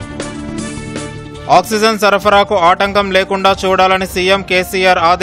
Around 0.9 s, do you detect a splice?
yes; 1 cut; at 0.9 s

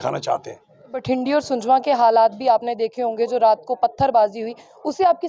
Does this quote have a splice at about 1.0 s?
yes; 1 cut; at 1.0 s

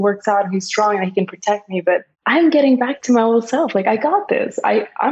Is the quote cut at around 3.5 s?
no; 1 cut; at 2.1 s

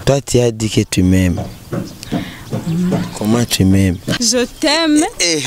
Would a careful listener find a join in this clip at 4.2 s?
yes; 1 cut; at 4.2 s

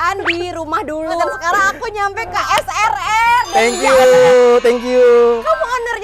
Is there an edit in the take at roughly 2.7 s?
no; 1 cut; at 1.2 s

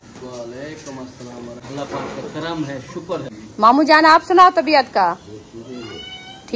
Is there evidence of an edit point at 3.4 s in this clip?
yes; 2 cuts; at 1.6 s, 3.4 s

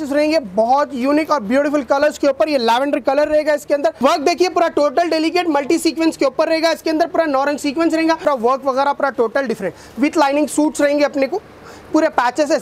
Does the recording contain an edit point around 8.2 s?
yes; 2 cuts; at 4.0 s, 8.2 s

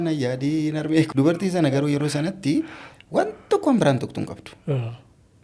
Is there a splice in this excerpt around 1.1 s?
yes; 1 cut; at 1.1 s

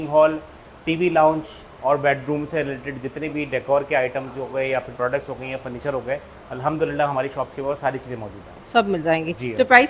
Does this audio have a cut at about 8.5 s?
no; 0 cuts

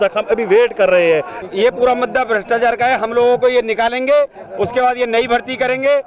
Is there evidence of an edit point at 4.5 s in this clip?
no; 1 cut; at 1.4 s

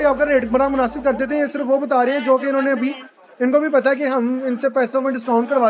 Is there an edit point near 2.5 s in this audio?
no; 0 cuts

